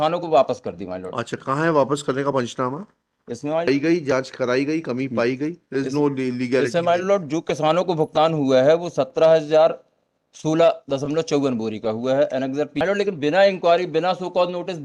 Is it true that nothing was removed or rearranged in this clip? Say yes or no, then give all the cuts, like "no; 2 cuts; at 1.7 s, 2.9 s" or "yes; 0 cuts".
no; 2 cuts; at 3.7 s, 12.8 s